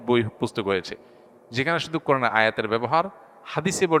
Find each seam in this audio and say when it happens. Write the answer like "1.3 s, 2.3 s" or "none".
none